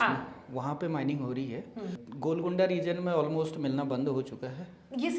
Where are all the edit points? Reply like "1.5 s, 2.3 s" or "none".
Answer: 2.0 s